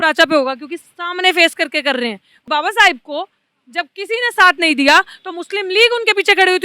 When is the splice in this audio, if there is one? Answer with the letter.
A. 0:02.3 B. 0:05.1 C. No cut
A